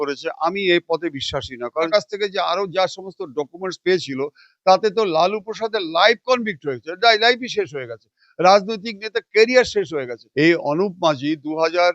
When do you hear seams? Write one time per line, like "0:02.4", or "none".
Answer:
0:01.9
0:10.2

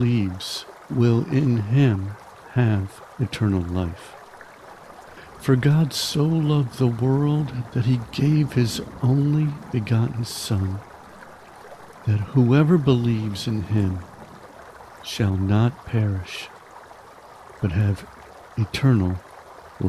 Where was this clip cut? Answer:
0:16.2
0:17.6

